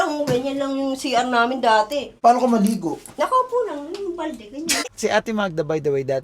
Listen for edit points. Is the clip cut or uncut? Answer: cut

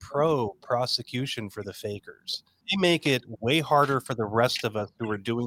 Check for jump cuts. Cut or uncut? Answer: cut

